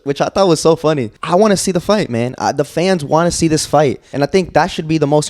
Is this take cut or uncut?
cut